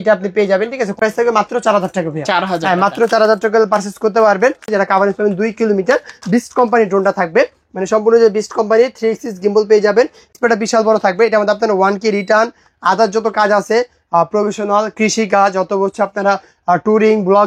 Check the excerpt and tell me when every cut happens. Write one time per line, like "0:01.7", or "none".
0:01.0
0:04.7
0:10.3